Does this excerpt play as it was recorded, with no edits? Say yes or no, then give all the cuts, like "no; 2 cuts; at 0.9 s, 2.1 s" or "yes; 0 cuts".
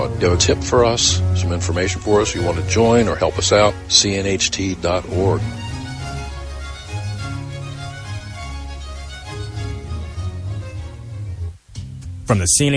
no; 1 cut; at 11.6 s